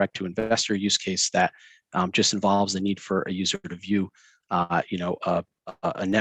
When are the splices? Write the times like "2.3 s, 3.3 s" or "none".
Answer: none